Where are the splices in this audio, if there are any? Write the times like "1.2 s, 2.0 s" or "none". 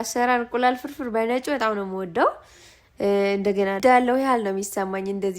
3.8 s